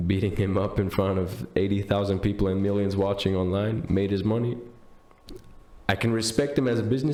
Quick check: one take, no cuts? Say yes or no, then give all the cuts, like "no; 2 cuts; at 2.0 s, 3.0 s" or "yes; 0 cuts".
yes; 0 cuts